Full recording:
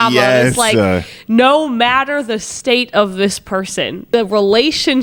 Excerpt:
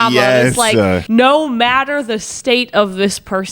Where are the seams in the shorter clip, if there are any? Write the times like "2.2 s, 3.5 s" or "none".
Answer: 1.0 s